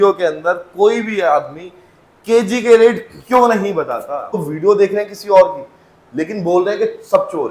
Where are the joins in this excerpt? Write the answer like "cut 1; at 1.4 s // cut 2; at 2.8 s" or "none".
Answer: cut 1; at 4.4 s